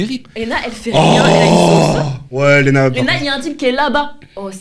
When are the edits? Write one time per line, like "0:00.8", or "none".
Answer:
none